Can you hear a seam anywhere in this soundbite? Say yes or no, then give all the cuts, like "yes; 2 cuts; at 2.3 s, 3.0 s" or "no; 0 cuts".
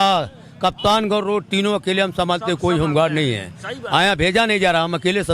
no; 0 cuts